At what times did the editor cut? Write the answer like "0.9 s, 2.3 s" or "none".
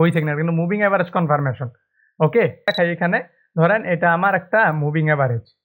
2.7 s

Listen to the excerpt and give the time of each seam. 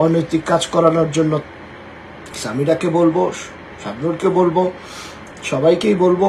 1.4 s

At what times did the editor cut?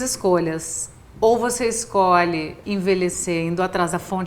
2.6 s

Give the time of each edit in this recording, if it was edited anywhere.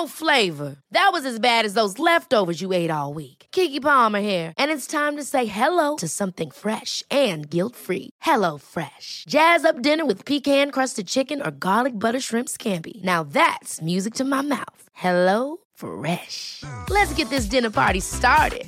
none

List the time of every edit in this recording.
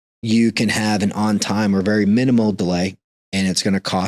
none

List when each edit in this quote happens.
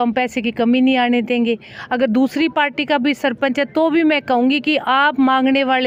none

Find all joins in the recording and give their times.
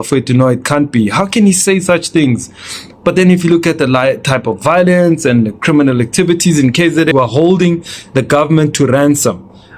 7.1 s

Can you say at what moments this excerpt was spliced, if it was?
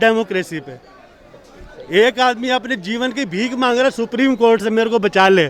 none

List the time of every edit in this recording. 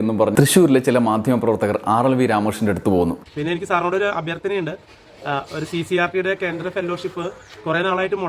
3.2 s

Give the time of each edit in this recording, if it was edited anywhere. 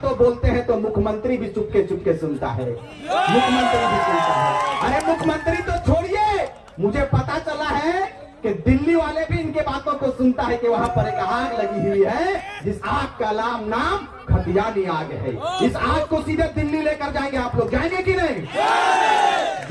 none

